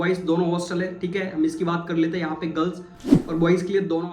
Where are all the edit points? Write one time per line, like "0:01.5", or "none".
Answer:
none